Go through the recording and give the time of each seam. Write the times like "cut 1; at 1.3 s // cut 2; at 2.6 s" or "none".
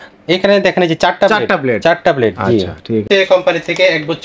cut 1; at 3.1 s